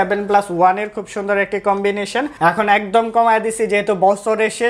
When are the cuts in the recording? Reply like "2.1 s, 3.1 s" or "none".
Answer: 2.4 s